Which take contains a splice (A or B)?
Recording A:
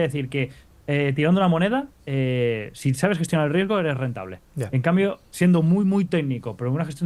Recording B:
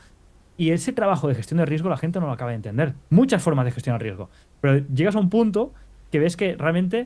B